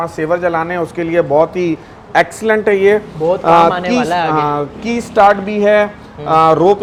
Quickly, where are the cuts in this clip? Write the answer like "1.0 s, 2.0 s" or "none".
none